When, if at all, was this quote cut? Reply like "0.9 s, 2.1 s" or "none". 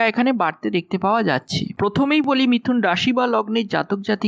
1.7 s